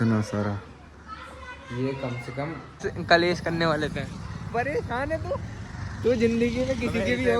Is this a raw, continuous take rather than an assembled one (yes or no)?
no